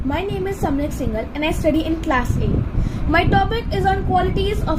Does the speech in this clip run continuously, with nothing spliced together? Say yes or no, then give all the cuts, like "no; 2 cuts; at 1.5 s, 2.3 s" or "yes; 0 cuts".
yes; 0 cuts